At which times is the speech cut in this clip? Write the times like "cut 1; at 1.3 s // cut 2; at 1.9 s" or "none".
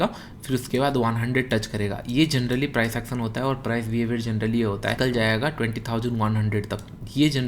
cut 1; at 5.0 s